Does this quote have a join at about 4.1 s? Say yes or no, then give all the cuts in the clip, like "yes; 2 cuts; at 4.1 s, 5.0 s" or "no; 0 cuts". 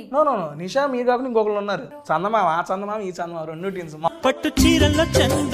yes; 2 cuts; at 1.9 s, 4.1 s